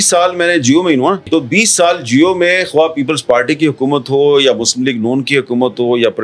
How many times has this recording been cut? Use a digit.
1